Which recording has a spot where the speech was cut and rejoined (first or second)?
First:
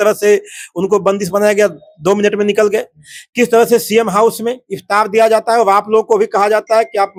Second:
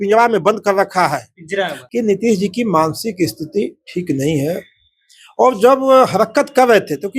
second